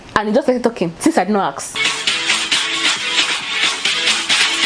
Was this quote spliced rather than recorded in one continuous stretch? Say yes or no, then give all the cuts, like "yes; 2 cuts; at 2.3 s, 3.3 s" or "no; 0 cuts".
no; 0 cuts